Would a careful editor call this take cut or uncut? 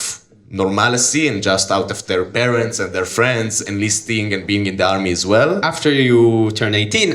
cut